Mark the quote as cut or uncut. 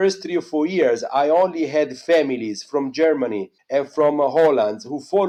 uncut